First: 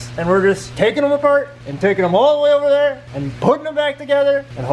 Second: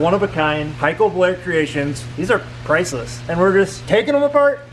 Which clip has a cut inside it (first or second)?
second